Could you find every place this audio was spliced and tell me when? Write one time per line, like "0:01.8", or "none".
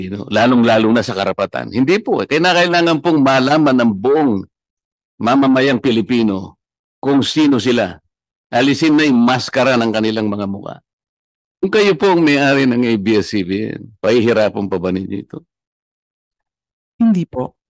0:11.6